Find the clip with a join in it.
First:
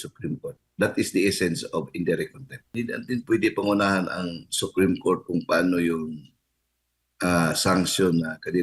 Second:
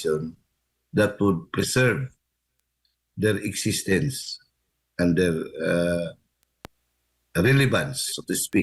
first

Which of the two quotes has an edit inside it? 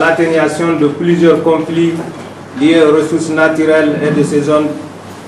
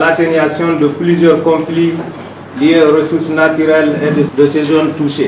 second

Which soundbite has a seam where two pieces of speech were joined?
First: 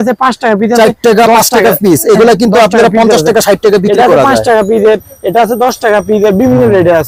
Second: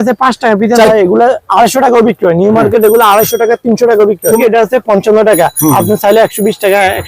second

